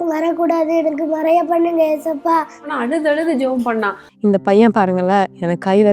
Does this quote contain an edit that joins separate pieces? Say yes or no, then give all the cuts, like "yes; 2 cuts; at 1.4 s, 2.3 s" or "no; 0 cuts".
yes; 1 cut; at 4.0 s